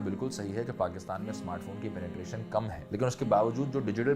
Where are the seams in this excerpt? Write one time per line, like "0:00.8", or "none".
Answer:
0:02.8